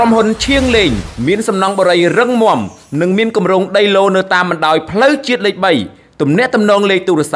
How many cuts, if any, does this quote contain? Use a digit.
0